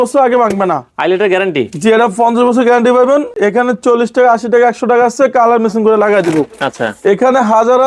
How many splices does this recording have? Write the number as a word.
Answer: zero